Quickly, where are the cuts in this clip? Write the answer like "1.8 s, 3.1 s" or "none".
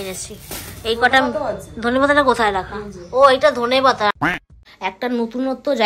4.1 s